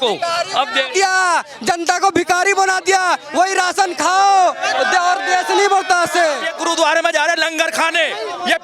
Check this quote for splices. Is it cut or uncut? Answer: cut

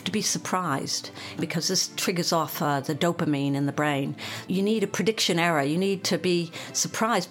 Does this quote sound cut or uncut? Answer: cut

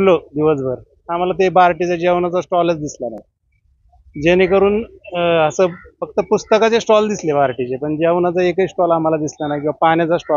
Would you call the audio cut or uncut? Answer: uncut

